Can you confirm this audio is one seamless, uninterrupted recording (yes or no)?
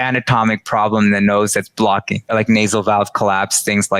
no